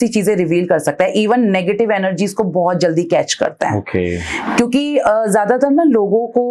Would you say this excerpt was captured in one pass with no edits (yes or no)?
yes